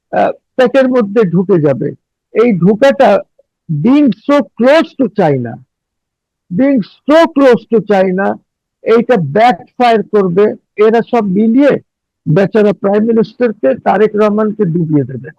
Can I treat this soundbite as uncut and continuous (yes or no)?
no